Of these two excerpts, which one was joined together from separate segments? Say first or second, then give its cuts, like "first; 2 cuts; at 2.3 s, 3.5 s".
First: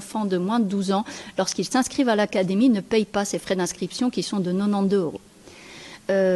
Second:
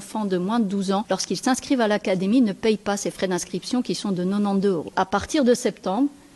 second; 2 cuts; at 1.0 s, 4.9 s